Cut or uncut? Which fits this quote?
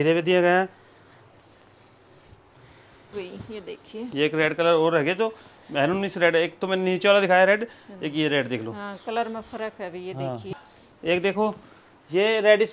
cut